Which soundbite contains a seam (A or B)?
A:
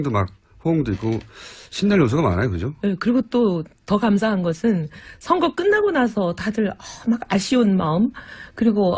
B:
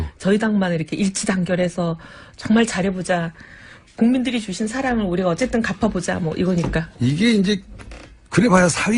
A